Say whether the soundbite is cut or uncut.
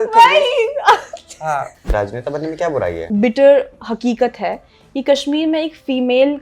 cut